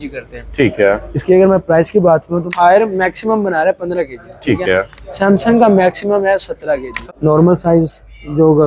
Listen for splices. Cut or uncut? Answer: cut